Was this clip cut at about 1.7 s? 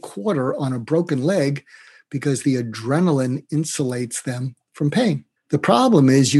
no; 0 cuts

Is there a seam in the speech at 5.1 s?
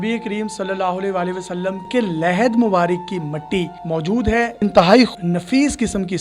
yes; 3 cuts; at 1.8 s, 4.5 s, 5.1 s

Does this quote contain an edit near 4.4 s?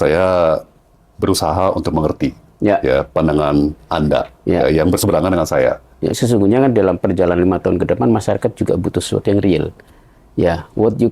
no; 1 cut; at 6.2 s

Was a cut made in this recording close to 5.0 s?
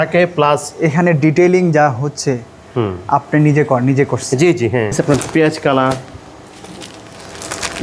yes; 1 cut; at 5.0 s

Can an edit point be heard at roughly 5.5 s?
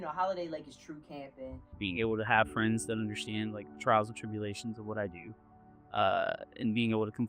no; 1 cut; at 1.6 s

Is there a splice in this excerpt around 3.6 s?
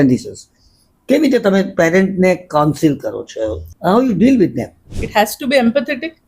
yes; 2 cuts; at 3.6 s, 4.9 s

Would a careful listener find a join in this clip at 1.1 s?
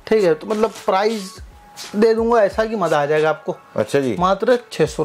no; 0 cuts

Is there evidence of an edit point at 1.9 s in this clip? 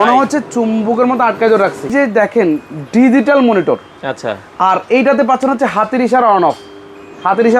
yes; 1 cut; at 1.9 s

